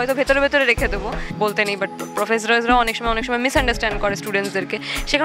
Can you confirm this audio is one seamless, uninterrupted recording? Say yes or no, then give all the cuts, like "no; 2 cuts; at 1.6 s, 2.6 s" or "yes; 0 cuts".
no; 1 cut; at 1.2 s